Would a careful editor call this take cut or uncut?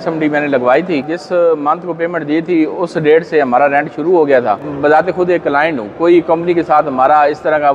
cut